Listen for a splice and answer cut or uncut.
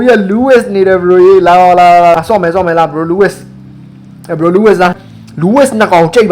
cut